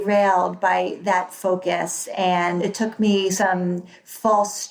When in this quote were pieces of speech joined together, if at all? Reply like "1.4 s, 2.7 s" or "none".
2.6 s